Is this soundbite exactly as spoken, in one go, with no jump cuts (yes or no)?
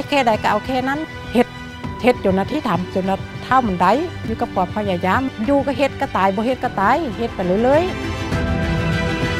no